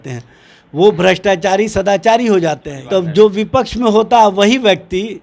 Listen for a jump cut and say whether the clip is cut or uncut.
cut